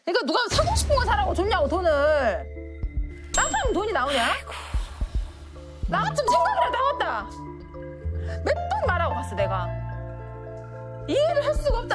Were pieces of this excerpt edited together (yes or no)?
no